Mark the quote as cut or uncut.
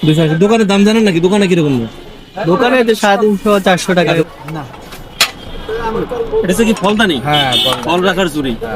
cut